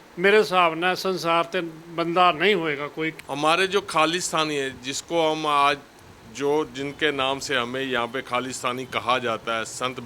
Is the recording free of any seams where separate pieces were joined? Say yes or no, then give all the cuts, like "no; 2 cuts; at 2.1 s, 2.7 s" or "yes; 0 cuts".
no; 1 cut; at 3.0 s